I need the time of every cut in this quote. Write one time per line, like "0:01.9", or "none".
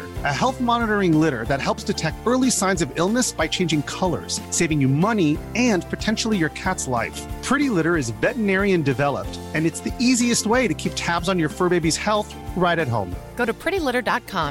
none